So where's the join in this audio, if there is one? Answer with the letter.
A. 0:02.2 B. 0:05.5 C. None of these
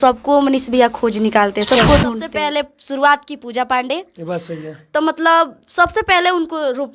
A